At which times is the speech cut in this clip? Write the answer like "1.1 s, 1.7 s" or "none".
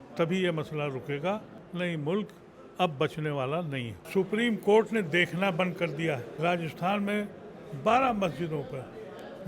1.6 s, 4.0 s, 6.3 s